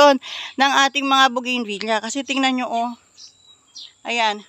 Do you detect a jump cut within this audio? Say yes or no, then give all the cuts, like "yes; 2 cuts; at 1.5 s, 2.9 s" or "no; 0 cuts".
no; 0 cuts